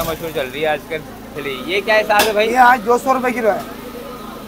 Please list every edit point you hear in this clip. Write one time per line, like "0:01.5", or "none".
0:01.4